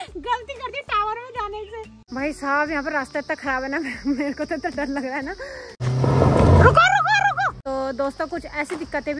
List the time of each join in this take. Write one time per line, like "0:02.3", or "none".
0:02.0
0:05.8
0:07.6